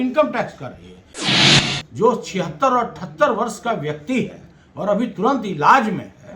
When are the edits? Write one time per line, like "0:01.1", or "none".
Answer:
0:01.4